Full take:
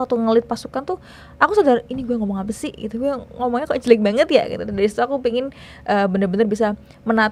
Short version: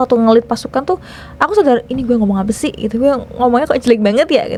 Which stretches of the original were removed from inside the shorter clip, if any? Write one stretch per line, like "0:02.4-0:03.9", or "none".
none